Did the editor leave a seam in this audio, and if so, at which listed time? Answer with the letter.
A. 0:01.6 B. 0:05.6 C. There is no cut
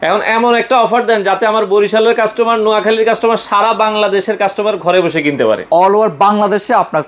B